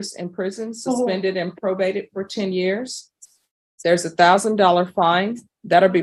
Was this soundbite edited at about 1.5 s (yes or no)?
no